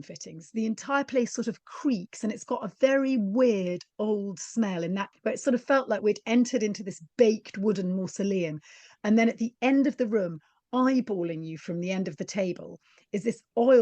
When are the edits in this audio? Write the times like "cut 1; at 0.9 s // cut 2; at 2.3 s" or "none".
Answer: cut 1; at 5.1 s